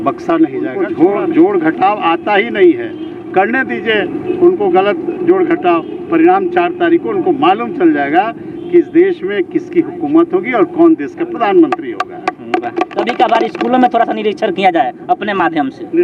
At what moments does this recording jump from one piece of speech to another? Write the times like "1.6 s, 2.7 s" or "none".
0.8 s, 13.1 s